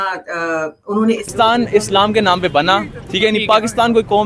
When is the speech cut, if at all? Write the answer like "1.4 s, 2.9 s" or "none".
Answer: 1.3 s